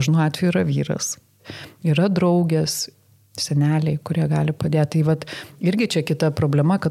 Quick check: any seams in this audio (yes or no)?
yes